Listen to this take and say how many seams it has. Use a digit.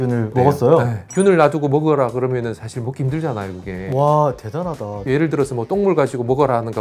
1